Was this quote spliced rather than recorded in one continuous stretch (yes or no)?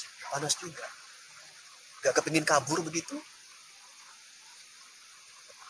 no